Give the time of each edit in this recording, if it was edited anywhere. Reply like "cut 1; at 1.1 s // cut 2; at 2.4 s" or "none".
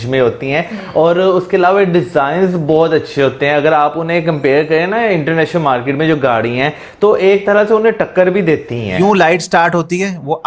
cut 1; at 8.9 s

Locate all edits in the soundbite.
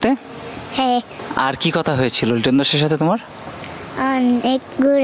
cut 1; at 1.2 s

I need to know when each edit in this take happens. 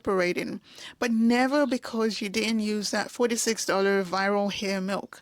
none

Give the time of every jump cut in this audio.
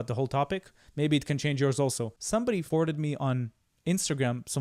cut 1; at 2.5 s

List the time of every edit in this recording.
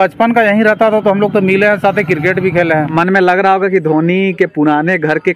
cut 1; at 2.9 s

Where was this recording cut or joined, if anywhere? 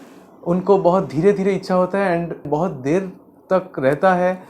cut 1; at 2.4 s

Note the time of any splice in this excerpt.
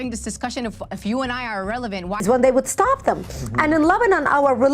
cut 1; at 2.2 s

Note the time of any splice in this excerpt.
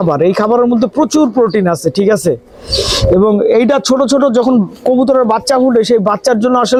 none

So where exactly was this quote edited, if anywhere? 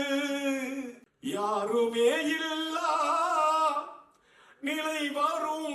cut 1; at 1.0 s

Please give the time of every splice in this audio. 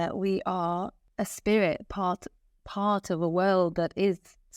cut 1; at 1.0 s

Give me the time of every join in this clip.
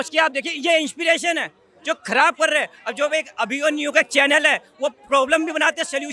none

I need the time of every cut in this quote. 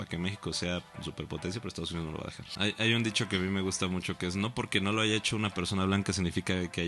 cut 1; at 2.5 s

